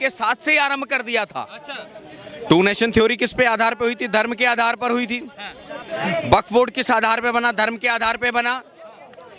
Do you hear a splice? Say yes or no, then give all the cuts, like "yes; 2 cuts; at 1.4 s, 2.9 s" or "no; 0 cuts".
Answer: no; 0 cuts